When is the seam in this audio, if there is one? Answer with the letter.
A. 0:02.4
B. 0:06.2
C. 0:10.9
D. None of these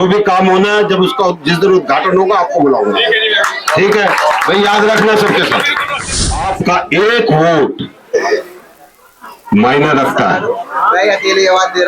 B